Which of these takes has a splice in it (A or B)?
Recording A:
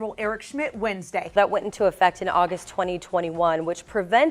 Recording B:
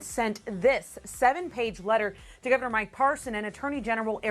A